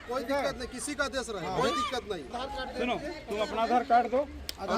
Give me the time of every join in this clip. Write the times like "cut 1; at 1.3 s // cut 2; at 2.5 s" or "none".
cut 1; at 2.3 s